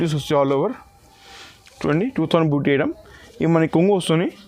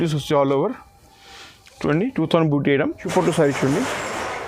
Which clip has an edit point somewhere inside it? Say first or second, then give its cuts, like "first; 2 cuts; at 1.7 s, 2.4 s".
second; 1 cut; at 3.0 s